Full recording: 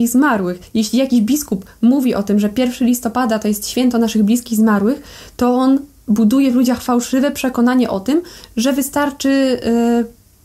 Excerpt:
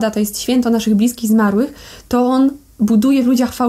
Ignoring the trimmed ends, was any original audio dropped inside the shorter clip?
no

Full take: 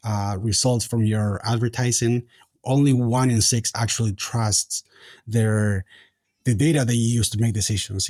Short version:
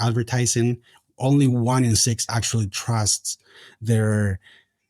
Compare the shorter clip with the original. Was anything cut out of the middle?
no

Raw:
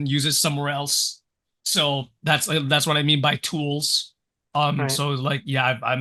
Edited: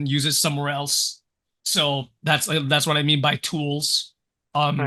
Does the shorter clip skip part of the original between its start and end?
no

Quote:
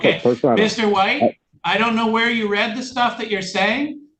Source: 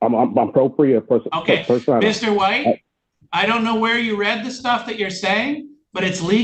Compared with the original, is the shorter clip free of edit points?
no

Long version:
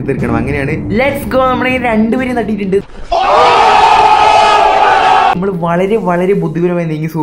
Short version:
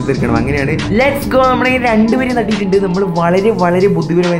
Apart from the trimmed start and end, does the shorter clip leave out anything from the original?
yes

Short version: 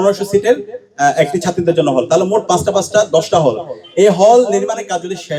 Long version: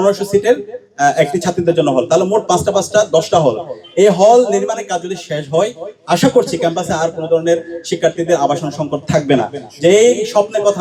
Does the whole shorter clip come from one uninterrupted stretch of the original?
yes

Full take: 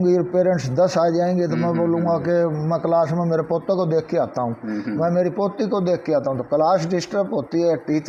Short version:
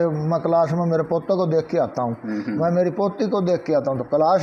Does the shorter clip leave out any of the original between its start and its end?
no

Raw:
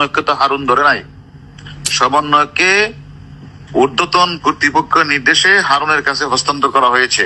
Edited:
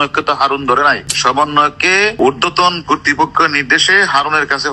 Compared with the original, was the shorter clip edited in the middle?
yes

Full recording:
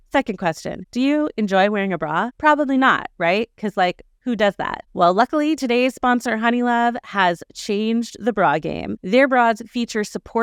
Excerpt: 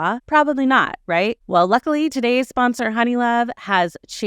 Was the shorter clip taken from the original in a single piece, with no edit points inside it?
no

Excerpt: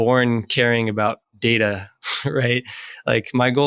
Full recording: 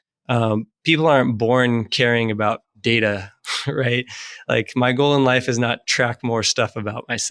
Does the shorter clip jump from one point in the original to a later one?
no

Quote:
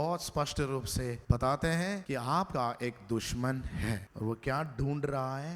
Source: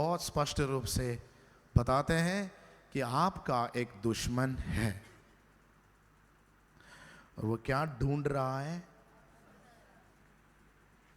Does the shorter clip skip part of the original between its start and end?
yes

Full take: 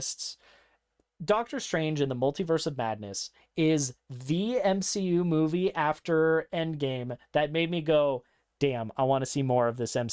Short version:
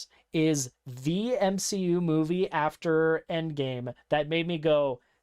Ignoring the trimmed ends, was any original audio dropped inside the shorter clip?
no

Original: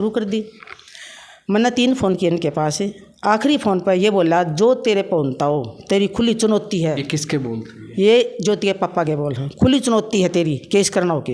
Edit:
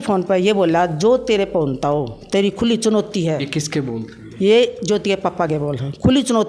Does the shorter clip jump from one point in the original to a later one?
no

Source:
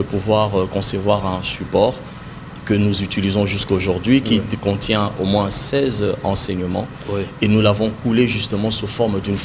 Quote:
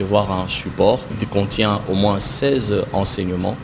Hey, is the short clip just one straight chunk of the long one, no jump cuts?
no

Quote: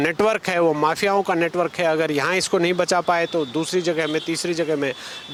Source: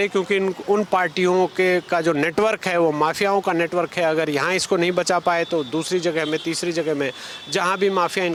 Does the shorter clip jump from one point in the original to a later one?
no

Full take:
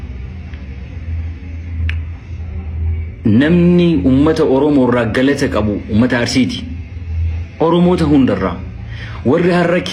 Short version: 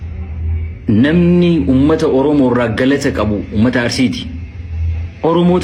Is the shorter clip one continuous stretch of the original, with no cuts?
yes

